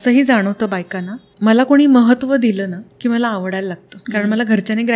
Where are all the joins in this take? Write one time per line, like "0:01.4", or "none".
none